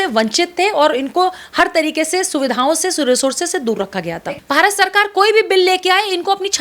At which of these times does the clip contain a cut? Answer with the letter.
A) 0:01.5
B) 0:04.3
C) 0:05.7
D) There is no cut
B